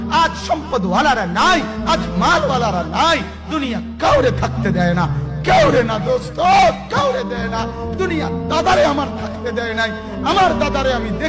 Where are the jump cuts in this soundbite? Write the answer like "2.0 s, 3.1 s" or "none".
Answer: none